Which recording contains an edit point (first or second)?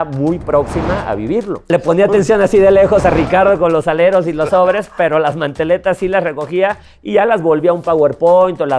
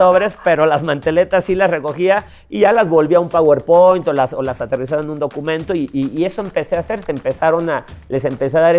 first